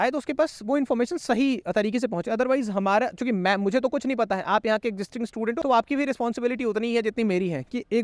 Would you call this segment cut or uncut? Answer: uncut